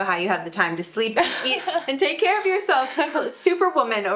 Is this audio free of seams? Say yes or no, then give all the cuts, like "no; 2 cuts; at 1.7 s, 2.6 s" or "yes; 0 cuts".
yes; 0 cuts